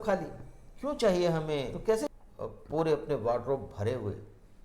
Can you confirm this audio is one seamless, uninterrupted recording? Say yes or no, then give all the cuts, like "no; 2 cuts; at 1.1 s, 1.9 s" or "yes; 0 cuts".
no; 1 cut; at 1.0 s